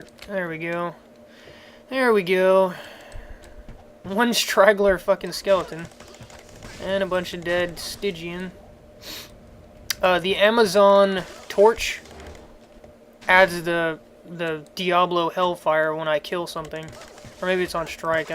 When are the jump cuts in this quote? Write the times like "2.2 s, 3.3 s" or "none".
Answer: 12.9 s